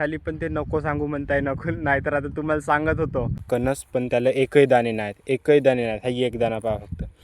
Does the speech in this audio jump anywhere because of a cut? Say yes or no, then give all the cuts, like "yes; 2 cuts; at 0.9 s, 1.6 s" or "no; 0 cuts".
yes; 1 cut; at 3.4 s